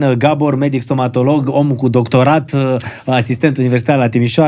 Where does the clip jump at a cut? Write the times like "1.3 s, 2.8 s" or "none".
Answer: none